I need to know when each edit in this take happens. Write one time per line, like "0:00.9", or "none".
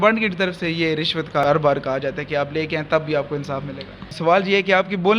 0:01.4
0:04.1